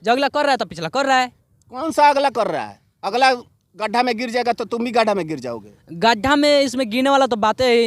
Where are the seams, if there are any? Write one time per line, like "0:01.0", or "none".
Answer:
none